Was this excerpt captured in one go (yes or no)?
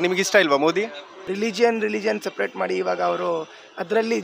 no